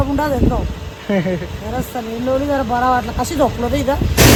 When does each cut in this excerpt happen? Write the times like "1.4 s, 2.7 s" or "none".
none